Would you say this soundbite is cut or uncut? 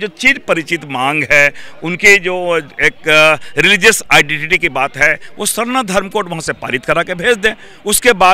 uncut